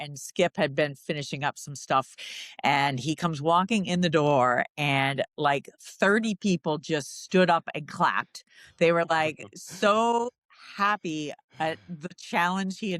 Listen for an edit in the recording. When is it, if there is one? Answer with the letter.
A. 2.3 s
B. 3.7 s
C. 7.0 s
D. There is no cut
A